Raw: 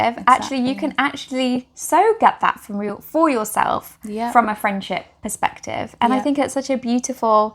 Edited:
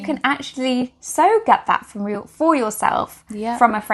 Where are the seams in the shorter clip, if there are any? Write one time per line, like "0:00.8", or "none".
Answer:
none

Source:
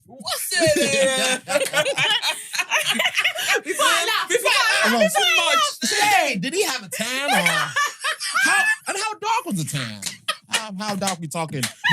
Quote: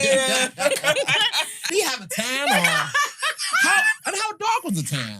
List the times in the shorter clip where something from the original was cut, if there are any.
0:01.7

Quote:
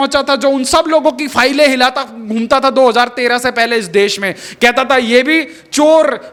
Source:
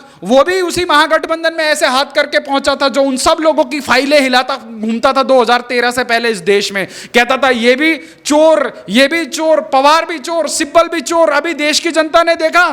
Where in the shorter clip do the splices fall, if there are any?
none

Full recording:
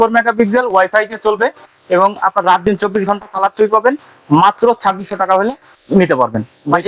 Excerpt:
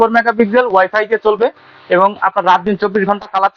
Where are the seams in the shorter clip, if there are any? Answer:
none

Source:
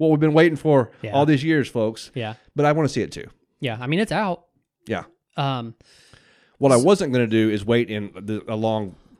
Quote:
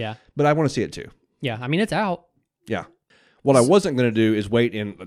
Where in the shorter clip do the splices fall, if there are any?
0:03.0

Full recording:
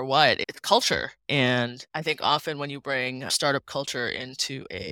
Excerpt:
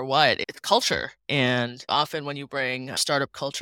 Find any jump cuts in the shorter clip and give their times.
0:01.8

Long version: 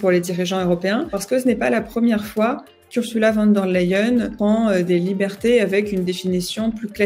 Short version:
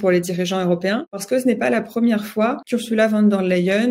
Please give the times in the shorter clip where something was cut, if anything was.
0:02.6

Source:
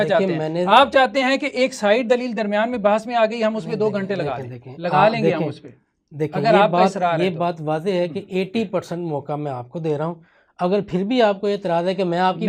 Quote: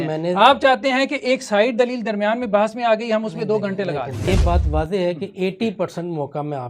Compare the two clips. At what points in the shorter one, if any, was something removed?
0:04.3

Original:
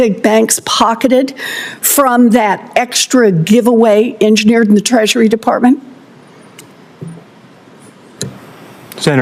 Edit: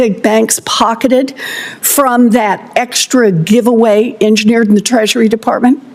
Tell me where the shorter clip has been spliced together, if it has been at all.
none

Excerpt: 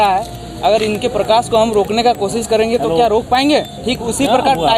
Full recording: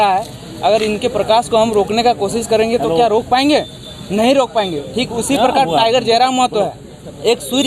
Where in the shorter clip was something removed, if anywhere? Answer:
0:03.8

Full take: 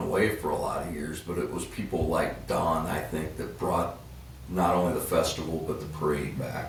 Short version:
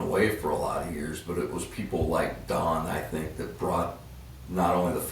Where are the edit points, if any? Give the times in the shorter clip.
none

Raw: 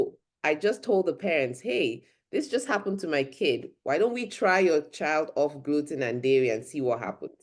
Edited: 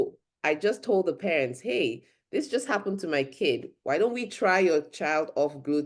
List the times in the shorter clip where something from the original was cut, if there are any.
none

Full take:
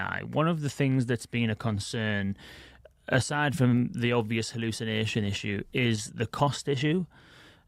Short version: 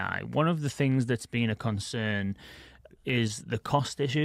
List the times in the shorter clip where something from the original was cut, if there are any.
0:03.0

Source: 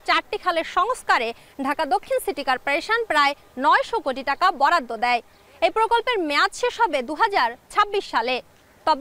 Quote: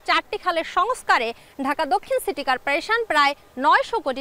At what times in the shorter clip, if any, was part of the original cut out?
none

